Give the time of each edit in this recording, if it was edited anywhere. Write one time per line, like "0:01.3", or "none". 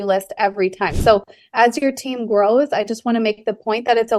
0:01.0